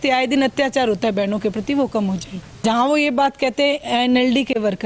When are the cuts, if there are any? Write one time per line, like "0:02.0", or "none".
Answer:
0:02.6